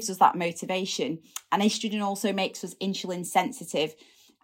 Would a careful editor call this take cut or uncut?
cut